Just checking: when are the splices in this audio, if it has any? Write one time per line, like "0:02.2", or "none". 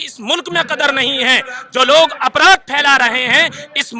none